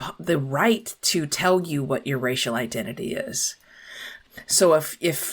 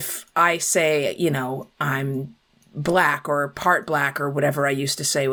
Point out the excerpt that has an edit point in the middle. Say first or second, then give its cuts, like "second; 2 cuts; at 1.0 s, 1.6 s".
first; 1 cut; at 4.2 s